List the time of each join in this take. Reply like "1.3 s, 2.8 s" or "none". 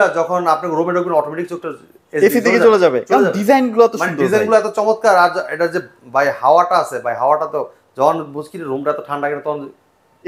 none